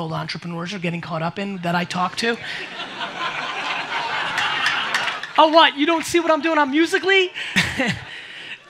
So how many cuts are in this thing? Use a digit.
1